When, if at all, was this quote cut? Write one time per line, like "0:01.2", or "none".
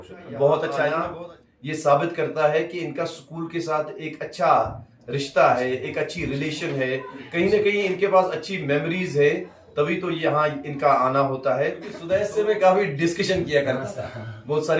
0:01.0
0:11.9